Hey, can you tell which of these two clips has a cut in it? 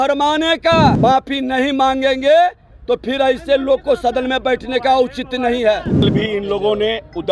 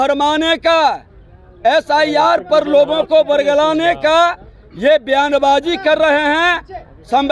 first; 2 cuts; at 1.0 s, 6.0 s

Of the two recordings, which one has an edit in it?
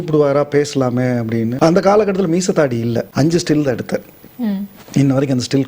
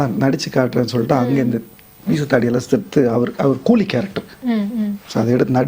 first; 2 cuts; at 1.5 s, 3.1 s

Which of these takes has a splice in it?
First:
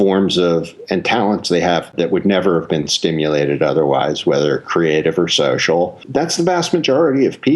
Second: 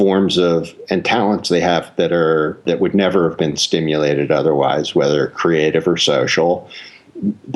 first; 2 cuts; at 1.9 s, 6.0 s

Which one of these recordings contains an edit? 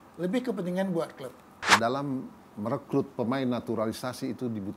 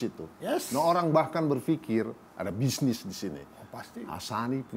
first; 1 cut; at 1.7 s

